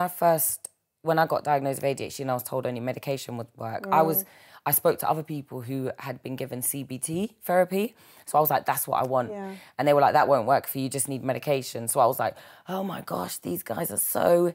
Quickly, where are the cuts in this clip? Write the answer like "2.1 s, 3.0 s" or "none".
none